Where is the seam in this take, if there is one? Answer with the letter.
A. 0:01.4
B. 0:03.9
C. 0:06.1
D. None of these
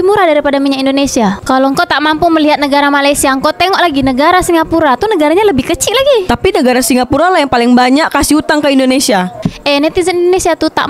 A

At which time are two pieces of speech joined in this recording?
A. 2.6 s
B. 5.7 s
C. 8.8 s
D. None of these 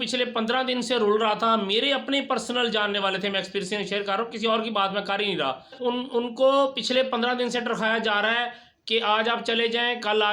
B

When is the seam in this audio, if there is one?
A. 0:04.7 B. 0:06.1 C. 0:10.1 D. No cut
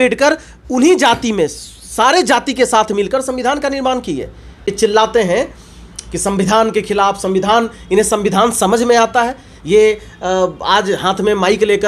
A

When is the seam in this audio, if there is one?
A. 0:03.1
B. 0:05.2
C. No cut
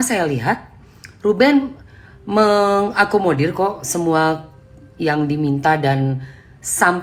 C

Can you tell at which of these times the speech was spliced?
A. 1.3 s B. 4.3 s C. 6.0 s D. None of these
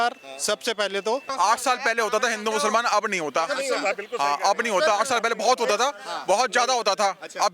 A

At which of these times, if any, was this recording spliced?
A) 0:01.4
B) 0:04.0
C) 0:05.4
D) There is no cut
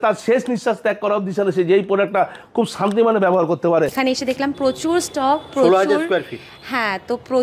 B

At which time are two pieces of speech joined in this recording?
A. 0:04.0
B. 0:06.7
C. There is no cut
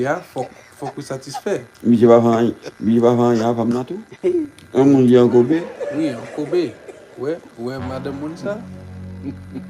A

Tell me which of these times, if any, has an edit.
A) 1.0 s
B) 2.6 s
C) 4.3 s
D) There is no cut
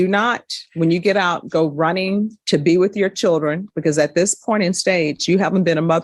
D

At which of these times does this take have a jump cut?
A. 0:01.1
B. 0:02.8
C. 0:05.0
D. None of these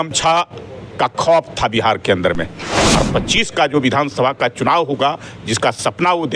B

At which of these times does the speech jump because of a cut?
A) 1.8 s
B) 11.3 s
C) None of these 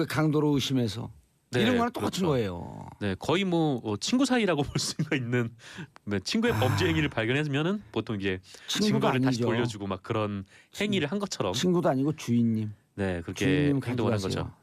B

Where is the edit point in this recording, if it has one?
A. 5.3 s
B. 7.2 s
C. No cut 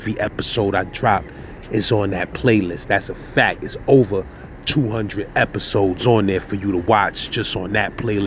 C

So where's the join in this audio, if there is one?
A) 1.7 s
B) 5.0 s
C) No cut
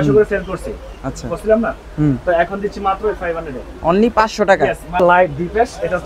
B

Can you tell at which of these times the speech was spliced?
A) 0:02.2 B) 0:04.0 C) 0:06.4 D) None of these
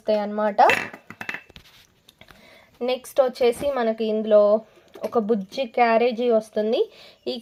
D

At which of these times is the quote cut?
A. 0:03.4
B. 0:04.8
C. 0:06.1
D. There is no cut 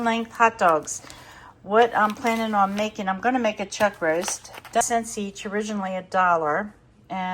B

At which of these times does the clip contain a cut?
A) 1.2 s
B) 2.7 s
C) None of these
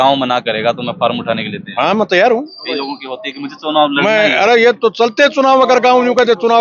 C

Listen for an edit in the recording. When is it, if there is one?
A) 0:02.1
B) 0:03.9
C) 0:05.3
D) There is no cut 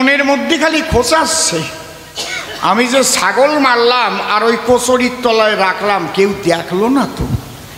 D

